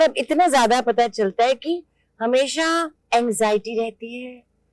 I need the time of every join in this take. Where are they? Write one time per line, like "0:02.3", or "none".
0:02.9